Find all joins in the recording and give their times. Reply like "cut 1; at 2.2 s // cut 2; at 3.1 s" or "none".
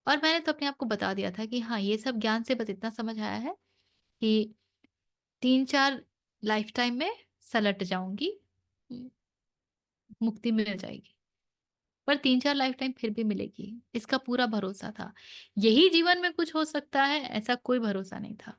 none